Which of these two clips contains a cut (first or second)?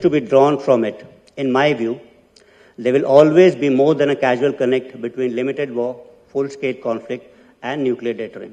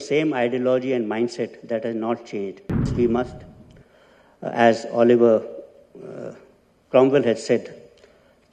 second